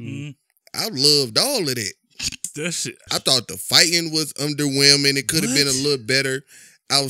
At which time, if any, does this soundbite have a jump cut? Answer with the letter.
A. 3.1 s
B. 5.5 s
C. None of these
A